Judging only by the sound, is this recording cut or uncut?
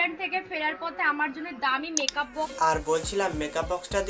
cut